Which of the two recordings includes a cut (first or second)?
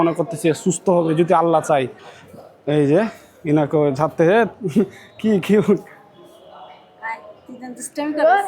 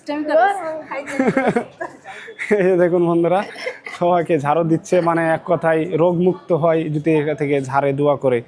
first